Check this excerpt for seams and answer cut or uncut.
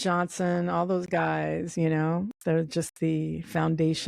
cut